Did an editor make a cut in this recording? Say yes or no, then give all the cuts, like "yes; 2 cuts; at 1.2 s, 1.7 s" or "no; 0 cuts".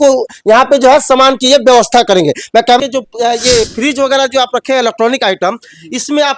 yes; 1 cut; at 2.8 s